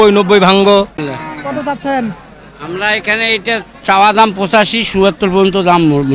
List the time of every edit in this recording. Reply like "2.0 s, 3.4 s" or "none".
1.0 s